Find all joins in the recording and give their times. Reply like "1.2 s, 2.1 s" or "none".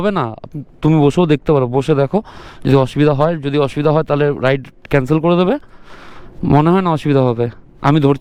none